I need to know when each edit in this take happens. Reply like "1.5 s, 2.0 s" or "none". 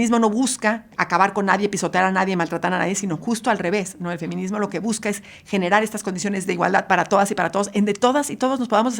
0.9 s